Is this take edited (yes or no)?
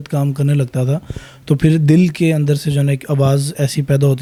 no